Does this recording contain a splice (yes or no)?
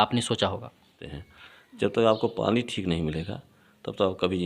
yes